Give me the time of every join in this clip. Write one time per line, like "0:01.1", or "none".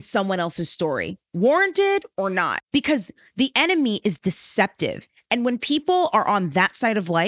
0:02.6